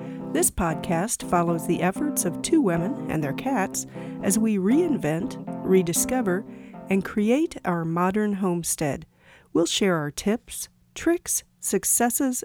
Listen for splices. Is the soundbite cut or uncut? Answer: uncut